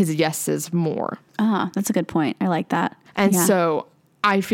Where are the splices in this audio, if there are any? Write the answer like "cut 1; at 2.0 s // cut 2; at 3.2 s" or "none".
cut 1; at 1.2 s